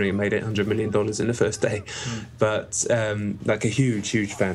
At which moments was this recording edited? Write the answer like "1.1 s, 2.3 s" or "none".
3.1 s